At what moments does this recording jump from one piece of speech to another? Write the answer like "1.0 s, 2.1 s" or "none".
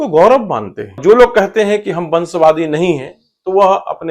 1.0 s